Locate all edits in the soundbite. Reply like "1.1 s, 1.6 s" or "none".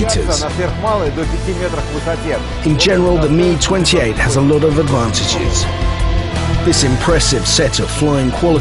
2.8 s

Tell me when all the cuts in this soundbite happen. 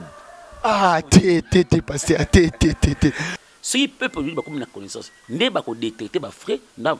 3.4 s

